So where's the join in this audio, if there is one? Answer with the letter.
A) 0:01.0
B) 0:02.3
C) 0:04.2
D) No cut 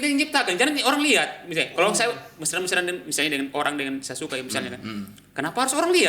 D